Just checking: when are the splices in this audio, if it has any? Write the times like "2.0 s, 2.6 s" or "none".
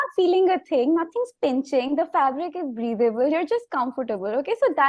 none